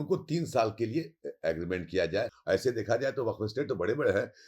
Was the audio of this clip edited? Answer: yes; 1 cut; at 2.4 s

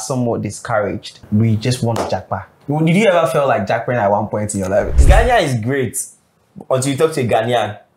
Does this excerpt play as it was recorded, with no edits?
no; 3 cuts; at 1.2 s, 2.5 s, 5.0 s

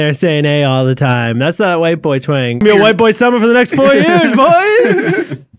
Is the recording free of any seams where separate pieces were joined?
no; 1 cut; at 2.6 s

